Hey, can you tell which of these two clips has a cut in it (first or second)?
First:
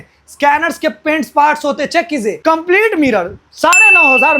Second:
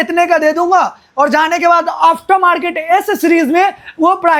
first